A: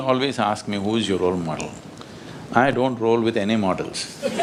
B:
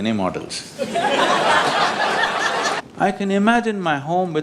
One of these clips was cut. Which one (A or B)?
B